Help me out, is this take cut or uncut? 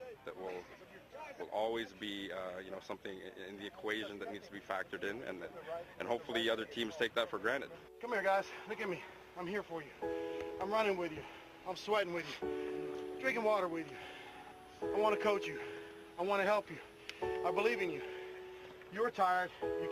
cut